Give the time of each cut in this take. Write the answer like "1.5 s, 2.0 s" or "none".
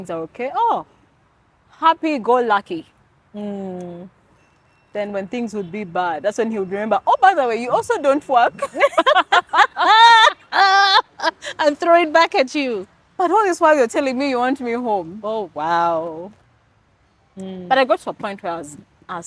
none